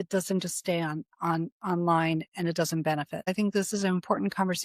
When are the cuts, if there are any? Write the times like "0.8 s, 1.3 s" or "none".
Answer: 3.3 s